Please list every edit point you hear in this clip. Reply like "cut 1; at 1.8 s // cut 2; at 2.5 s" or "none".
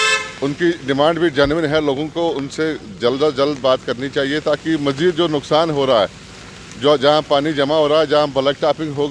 none